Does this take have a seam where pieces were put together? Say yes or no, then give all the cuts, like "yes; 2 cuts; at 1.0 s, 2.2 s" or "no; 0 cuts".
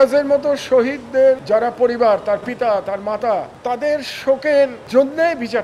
yes; 3 cuts; at 1.4 s, 3.5 s, 4.8 s